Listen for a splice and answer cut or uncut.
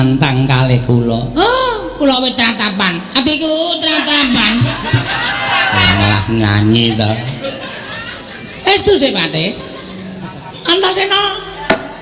uncut